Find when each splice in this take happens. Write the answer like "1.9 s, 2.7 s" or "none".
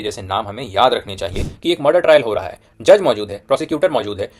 1.5 s